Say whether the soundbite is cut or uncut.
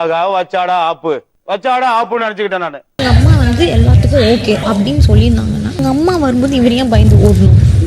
cut